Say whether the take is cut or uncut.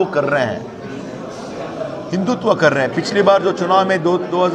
uncut